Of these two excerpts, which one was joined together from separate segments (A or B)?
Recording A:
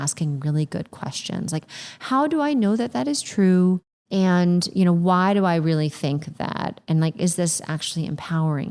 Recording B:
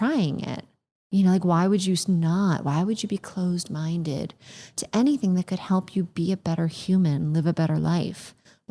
A